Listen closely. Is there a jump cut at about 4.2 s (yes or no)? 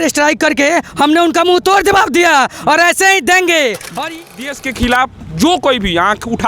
yes